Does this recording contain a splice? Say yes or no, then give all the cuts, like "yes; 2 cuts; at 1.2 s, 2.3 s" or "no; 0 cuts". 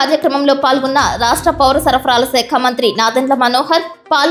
no; 0 cuts